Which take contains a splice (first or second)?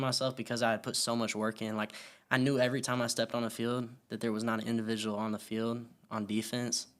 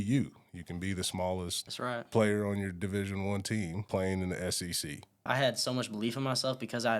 second